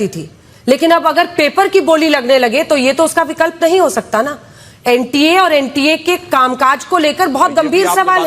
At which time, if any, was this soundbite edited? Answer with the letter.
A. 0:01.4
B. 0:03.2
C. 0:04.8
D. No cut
D